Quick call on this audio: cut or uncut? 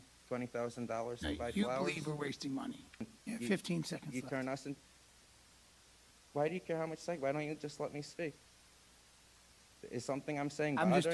cut